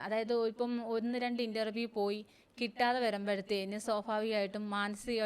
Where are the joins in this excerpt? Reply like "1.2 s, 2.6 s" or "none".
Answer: none